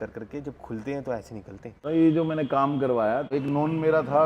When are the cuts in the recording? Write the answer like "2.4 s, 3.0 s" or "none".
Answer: 1.9 s, 3.3 s